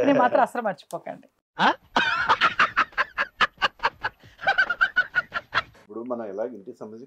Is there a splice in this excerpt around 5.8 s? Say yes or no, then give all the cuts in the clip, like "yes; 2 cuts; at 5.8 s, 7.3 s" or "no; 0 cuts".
yes; 1 cut; at 5.8 s